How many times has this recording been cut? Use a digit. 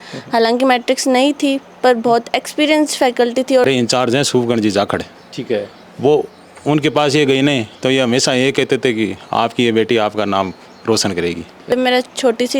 2